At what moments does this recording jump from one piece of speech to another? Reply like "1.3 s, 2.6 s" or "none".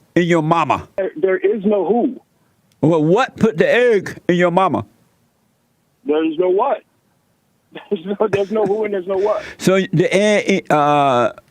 1.0 s